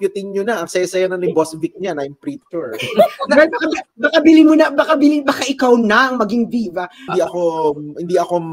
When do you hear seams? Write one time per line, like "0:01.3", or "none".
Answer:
0:07.0